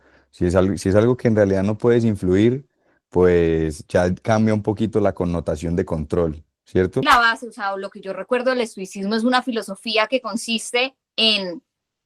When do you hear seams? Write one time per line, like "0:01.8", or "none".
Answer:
0:07.0